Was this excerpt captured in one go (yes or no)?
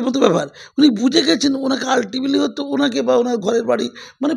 yes